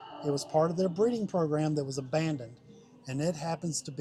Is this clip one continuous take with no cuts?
yes; 0 cuts

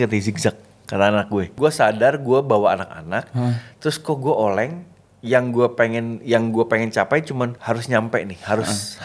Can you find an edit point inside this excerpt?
yes; 2 cuts; at 1.5 s, 7.6 s

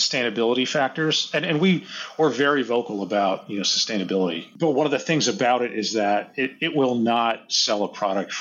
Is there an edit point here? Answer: yes; 1 cut; at 4.4 s

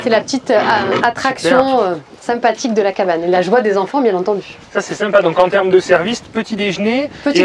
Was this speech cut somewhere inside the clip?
no; 0 cuts

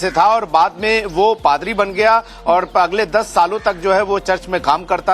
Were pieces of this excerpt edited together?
yes; 1 cut; at 2.9 s

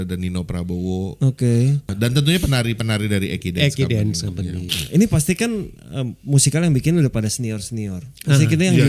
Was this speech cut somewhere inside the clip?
yes; 2 cuts; at 1.9 s, 4.6 s

